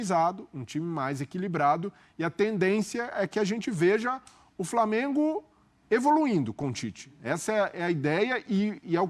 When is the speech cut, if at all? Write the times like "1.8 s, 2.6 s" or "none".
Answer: none